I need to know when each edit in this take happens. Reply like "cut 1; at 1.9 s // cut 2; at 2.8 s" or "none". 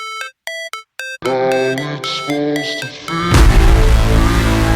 cut 1; at 1.1 s